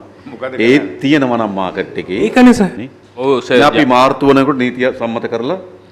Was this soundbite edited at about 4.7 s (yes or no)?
no